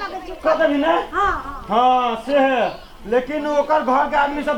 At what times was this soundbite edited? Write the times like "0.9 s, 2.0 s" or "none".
none